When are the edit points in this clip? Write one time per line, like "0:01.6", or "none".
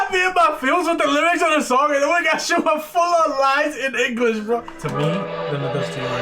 0:04.7